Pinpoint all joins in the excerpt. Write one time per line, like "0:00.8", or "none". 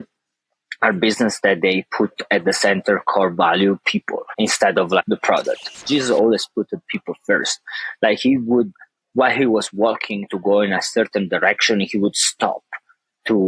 0:05.7